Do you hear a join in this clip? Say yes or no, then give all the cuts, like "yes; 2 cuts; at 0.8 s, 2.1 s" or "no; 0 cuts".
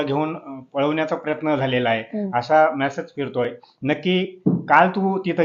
no; 0 cuts